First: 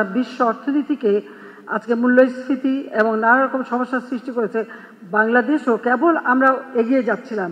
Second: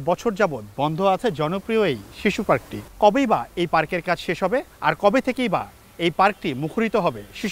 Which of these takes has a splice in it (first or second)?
second